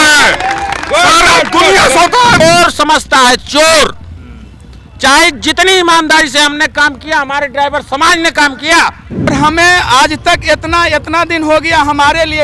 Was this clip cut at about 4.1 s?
no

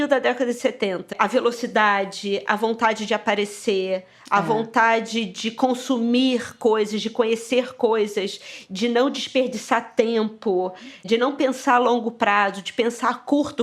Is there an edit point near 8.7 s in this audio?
no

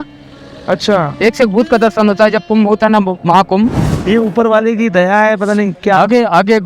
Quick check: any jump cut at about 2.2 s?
no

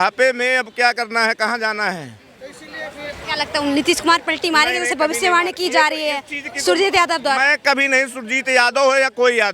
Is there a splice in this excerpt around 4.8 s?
no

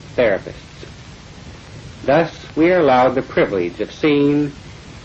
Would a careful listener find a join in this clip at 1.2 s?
no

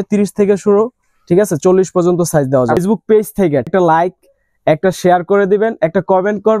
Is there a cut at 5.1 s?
no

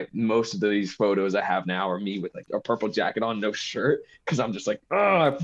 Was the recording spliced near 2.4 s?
yes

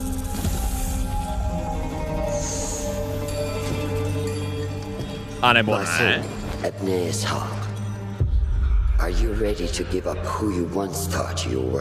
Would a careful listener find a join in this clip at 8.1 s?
no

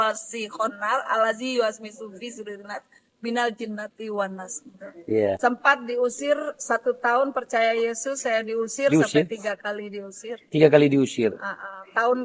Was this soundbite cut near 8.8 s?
no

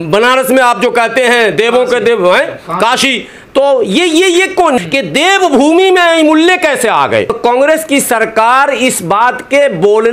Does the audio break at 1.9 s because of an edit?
no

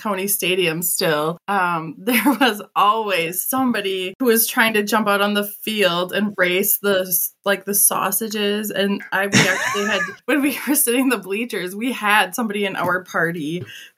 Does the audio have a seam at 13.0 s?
no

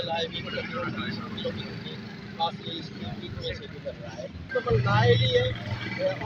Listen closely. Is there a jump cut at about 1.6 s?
no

